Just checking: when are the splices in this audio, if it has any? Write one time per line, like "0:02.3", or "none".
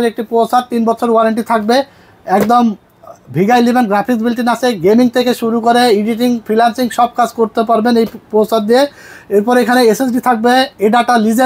none